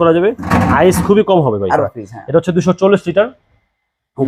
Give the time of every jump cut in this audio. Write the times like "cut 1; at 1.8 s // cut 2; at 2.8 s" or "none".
cut 1; at 1.8 s